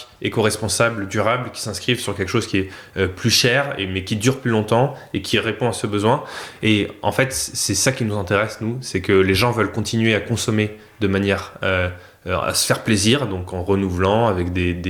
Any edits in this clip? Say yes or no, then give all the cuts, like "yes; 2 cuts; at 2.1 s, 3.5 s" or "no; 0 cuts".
no; 0 cuts